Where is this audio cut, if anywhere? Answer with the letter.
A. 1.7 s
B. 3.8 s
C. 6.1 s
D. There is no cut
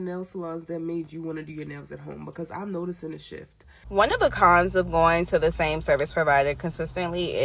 B